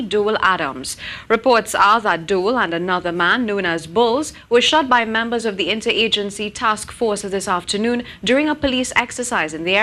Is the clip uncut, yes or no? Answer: yes